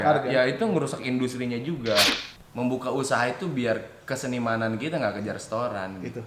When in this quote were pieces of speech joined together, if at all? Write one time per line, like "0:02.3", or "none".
0:02.1